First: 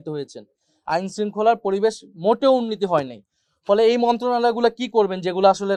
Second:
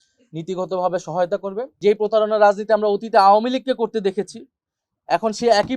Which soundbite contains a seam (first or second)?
second